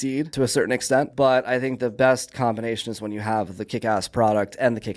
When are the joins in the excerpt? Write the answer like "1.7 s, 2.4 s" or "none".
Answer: 1.1 s